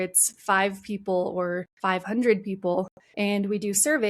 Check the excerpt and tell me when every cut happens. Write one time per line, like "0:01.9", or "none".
0:01.7
0:03.0